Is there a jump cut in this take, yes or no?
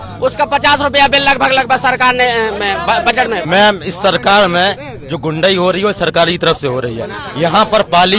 yes